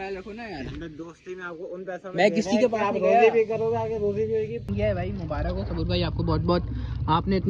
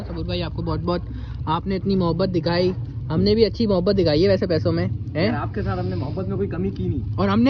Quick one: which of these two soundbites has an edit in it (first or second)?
first